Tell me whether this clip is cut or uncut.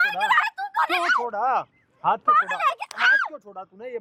uncut